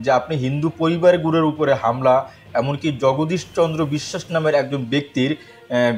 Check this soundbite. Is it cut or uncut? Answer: uncut